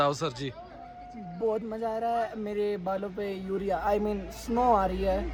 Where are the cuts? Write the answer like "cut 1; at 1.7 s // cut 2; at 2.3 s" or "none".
none